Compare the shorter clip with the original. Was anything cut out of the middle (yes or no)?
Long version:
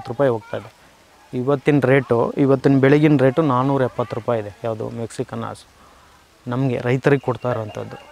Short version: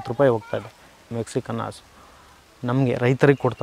yes